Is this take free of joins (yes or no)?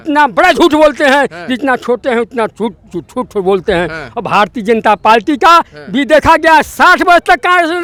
yes